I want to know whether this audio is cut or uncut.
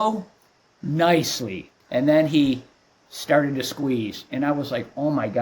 cut